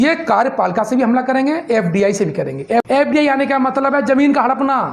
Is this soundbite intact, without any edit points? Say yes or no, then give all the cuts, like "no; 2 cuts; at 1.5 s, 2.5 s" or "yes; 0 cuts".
no; 1 cut; at 2.8 s